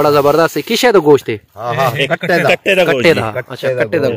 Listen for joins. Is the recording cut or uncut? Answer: uncut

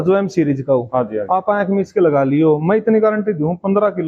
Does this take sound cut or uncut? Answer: uncut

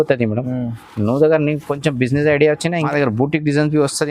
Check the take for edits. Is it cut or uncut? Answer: cut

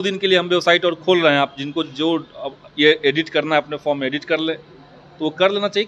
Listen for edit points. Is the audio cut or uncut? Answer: uncut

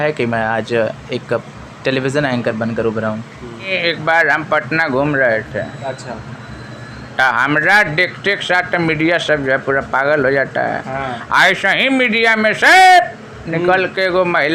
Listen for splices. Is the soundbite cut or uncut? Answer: cut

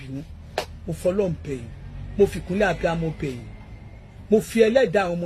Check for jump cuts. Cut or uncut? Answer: uncut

